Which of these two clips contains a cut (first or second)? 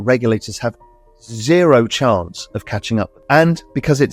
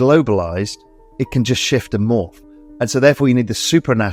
first